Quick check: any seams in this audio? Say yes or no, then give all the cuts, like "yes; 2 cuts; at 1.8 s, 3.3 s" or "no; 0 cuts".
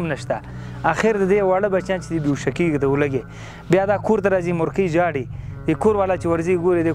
no; 0 cuts